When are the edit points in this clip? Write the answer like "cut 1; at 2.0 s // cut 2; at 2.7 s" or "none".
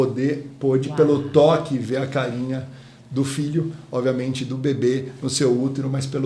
none